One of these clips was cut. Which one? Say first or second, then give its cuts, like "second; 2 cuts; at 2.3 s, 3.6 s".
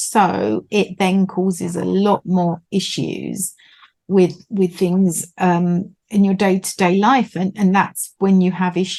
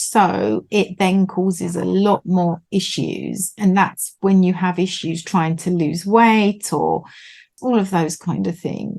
second; 2 cuts; at 3.5 s, 7.6 s